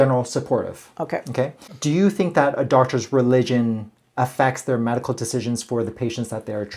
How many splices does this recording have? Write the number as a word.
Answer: one